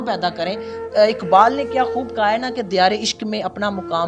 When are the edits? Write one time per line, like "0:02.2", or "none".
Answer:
none